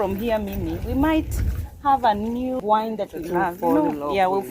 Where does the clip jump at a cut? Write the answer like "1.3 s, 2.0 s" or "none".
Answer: 2.6 s

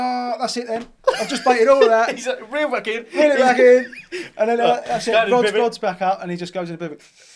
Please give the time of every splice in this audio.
none

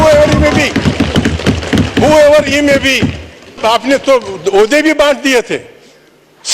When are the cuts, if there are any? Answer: 3.6 s

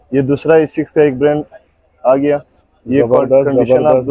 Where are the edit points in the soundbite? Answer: none

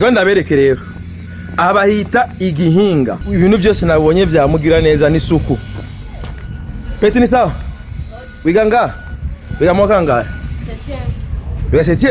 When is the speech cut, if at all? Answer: 3.2 s

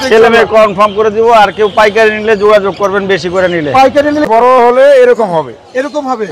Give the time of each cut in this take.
4.3 s

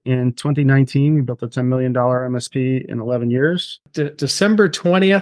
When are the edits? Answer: 3.8 s

